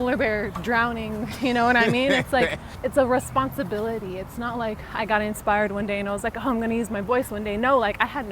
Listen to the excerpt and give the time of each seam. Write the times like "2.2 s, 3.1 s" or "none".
2.7 s

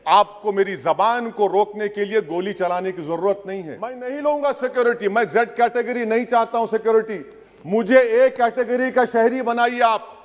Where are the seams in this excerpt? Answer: 4.0 s

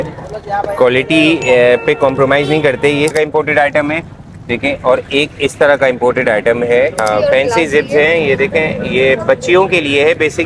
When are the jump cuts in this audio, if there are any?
3.1 s, 7.0 s

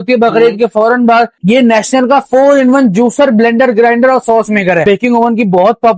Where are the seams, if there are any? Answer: 1.4 s, 4.8 s

